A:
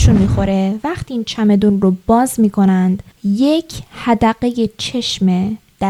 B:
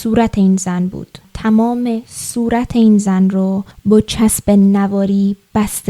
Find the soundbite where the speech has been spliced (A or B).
B